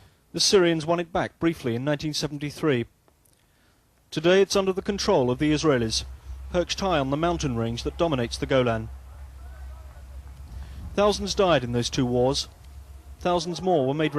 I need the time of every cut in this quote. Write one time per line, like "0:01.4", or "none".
0:11.6

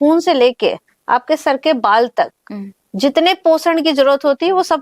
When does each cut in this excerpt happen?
none

